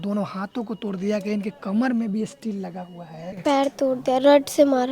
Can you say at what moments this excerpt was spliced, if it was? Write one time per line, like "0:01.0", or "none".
0:03.2